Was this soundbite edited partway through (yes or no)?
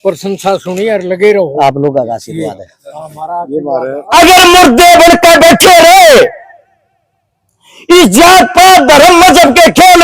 yes